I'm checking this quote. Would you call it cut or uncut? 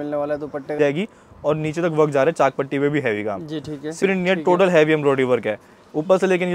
cut